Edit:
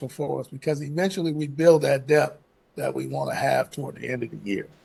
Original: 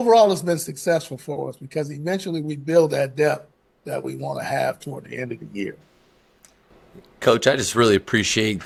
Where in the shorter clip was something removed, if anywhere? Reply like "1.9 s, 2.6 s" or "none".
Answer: none